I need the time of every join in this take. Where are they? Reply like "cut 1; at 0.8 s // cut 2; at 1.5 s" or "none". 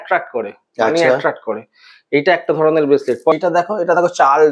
cut 1; at 3.3 s